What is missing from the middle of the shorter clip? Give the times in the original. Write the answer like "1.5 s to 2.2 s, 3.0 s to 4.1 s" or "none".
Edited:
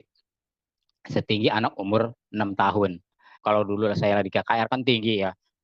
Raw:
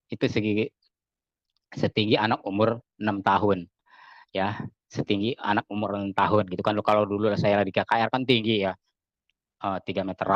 4.1 s to 6.8 s